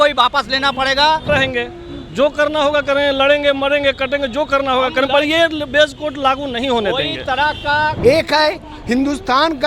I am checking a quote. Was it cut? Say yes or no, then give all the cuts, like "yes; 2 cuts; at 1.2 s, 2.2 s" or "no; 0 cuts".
yes; 2 cuts; at 1.3 s, 8.0 s